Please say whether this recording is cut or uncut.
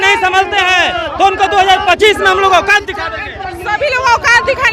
uncut